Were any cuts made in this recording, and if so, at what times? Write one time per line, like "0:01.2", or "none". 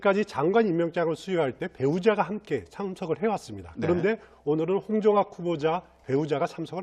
0:02.0